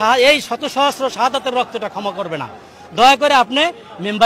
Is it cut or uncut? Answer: uncut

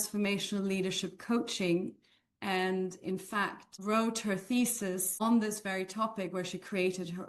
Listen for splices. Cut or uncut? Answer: cut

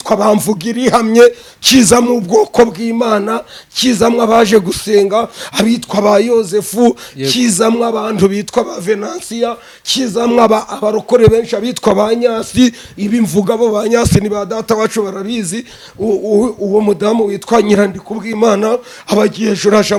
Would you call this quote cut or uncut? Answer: uncut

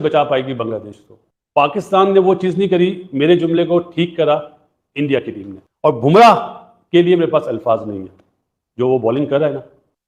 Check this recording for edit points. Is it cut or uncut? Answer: uncut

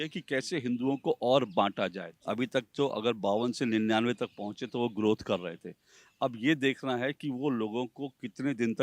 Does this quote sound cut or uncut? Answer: cut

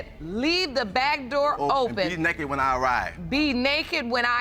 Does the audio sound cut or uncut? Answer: uncut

